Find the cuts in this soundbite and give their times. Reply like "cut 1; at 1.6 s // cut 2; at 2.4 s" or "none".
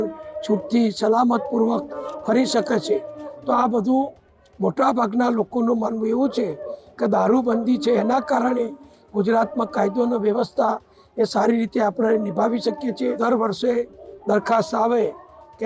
cut 1; at 13.2 s